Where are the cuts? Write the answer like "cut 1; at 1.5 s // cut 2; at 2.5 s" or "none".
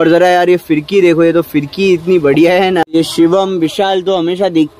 cut 1; at 2.9 s